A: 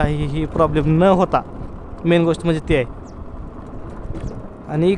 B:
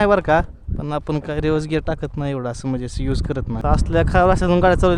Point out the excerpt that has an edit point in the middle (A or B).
B